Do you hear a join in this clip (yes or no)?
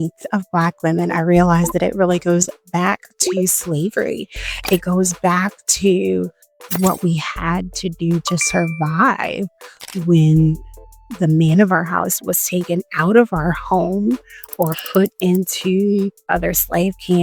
no